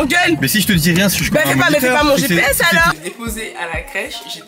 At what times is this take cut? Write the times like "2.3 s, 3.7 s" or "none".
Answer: 2.9 s